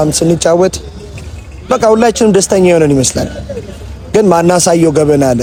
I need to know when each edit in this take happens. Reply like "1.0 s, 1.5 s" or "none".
none